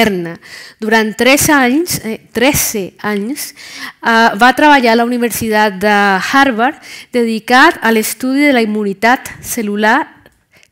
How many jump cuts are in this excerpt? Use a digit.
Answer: 1